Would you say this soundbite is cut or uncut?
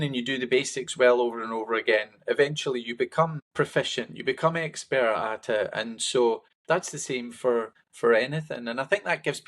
cut